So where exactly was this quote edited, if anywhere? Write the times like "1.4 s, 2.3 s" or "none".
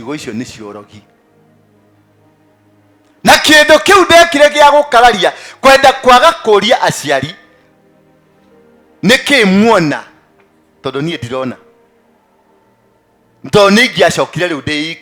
none